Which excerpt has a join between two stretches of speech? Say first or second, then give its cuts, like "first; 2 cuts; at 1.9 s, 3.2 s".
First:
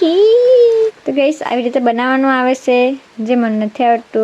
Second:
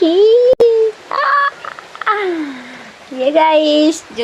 first; 1 cut; at 1.0 s